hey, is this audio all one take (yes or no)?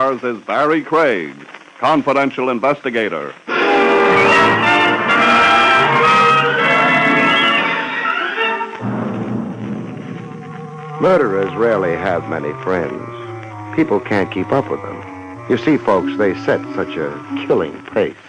yes